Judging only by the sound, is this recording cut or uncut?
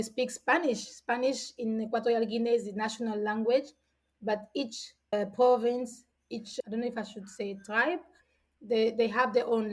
uncut